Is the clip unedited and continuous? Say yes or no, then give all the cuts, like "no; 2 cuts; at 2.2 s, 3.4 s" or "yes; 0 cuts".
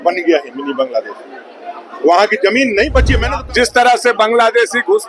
no; 1 cut; at 3.2 s